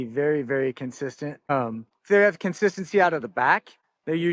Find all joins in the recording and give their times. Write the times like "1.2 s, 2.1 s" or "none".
none